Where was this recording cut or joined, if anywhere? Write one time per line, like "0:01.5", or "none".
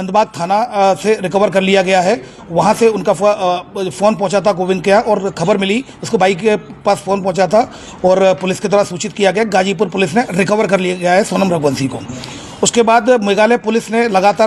none